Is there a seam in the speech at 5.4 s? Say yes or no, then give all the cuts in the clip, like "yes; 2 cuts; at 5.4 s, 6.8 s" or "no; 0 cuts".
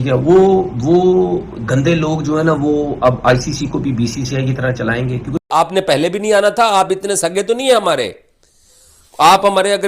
yes; 1 cut; at 5.4 s